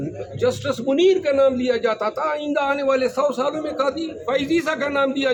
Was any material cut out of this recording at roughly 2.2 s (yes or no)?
no